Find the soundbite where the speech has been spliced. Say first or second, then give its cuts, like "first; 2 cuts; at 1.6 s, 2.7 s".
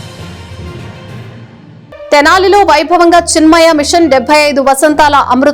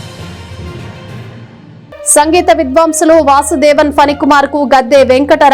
first; 1 cut; at 1.4 s